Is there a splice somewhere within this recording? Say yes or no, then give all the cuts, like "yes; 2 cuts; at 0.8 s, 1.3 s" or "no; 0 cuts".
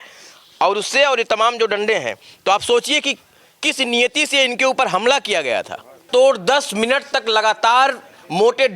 yes; 1 cut; at 6.0 s